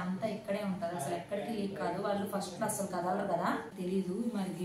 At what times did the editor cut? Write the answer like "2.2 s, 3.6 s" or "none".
3.7 s